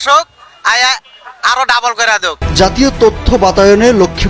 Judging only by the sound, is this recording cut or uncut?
cut